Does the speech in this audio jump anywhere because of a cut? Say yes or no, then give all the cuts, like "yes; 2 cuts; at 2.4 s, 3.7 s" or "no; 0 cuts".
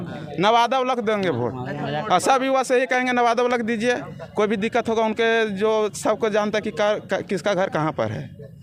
no; 0 cuts